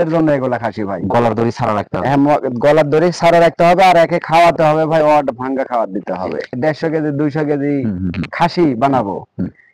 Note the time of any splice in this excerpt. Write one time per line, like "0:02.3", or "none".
none